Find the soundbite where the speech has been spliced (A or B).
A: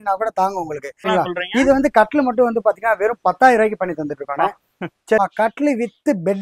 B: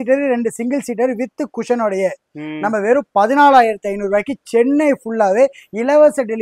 A